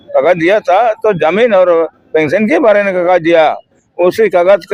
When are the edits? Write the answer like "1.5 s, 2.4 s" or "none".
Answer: none